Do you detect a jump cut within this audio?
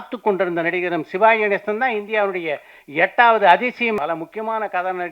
yes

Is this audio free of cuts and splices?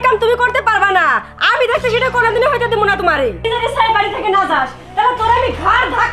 no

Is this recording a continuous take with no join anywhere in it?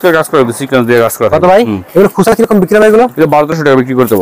no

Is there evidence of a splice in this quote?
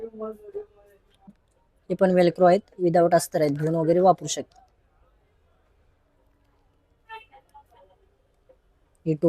yes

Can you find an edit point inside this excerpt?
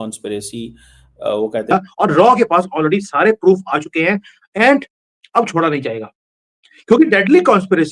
yes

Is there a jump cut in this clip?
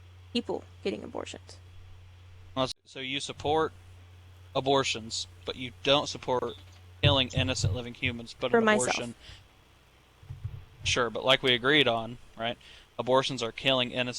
yes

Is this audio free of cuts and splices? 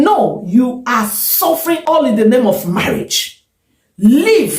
no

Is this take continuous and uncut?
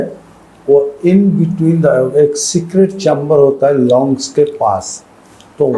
yes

